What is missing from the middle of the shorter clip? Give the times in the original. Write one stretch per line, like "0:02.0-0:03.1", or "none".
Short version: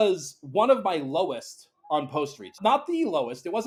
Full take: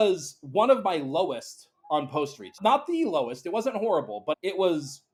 none